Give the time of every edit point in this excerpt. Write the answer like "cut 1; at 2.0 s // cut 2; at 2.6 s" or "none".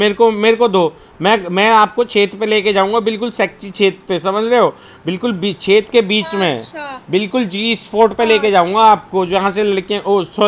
none